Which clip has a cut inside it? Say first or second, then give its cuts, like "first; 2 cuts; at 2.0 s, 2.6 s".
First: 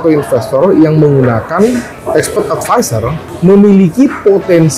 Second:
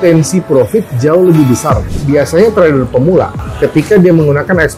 second; 2 cuts; at 1.9 s, 3.4 s